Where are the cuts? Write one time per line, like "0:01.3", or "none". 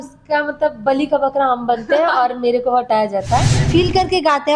0:03.6

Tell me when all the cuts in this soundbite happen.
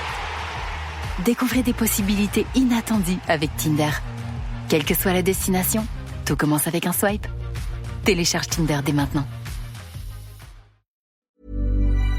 0:11.1

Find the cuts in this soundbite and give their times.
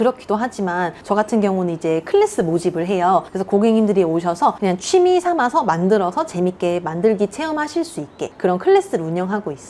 none

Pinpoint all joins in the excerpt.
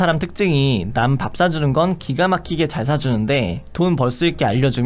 none

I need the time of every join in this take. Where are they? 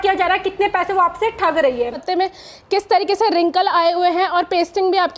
0:02.0

